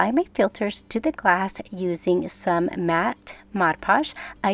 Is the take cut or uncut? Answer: uncut